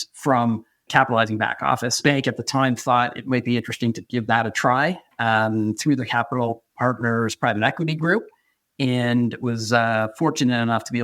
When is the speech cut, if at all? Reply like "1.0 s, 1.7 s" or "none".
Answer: 1.9 s